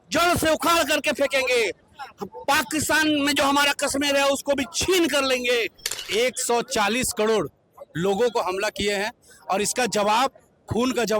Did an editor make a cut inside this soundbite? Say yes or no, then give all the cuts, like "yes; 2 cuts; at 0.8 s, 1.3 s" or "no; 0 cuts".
yes; 1 cut; at 6.0 s